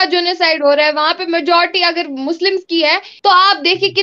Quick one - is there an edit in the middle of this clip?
yes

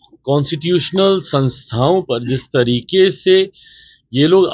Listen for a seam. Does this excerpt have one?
no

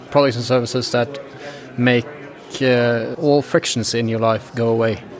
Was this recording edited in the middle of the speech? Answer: yes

